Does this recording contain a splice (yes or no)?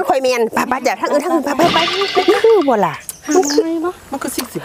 yes